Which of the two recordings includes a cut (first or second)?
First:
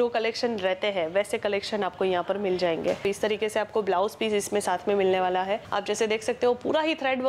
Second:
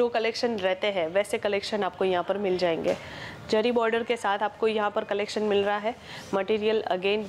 first